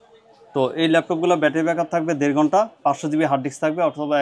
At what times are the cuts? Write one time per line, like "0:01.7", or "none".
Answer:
none